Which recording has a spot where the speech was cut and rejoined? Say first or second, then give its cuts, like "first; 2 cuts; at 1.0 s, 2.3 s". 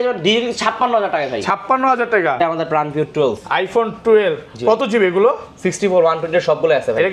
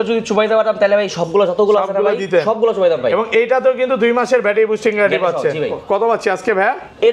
first; 1 cut; at 2.4 s